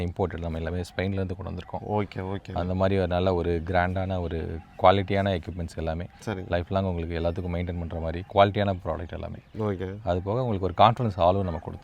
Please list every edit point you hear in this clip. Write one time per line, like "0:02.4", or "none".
none